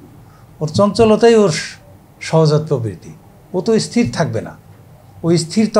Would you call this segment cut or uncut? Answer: uncut